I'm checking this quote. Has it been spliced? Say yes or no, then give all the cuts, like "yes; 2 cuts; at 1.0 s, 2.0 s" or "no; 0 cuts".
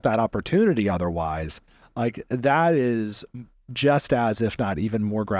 no; 0 cuts